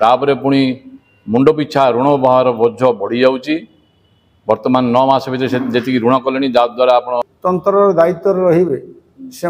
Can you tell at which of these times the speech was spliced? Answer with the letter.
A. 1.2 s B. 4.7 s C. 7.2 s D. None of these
C